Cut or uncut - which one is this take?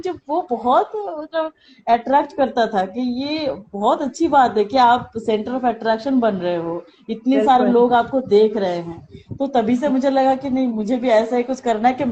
uncut